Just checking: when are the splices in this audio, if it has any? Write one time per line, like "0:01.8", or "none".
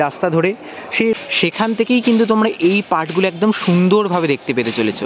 0:01.1

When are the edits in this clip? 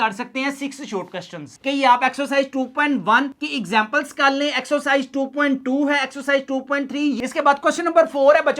0:01.6
0:07.2

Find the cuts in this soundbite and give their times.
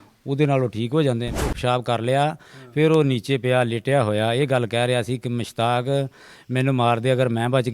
0:01.5

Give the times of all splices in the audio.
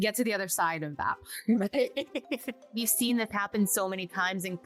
none

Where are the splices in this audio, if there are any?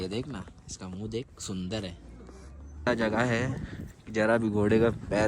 0:02.9

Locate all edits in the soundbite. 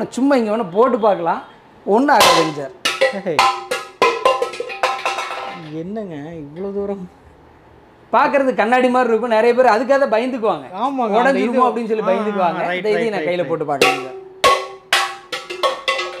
none

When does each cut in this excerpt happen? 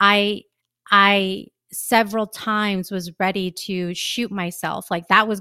none

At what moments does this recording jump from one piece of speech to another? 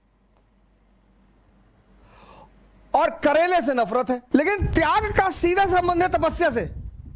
0:04.2

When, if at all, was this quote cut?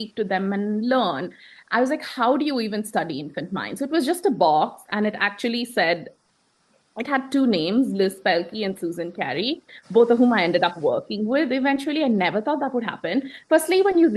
none

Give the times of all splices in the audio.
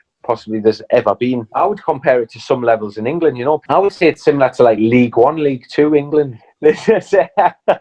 0:01.5
0:03.6
0:06.4

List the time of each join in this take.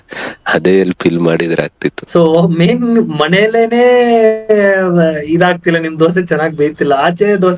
0:02.0

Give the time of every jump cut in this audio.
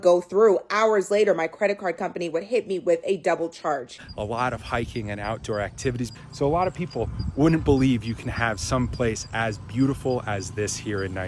0:04.0
0:06.1

